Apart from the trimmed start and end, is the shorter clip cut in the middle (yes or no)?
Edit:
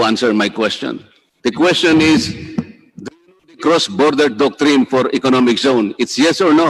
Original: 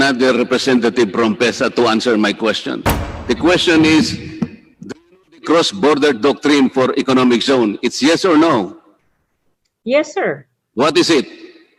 no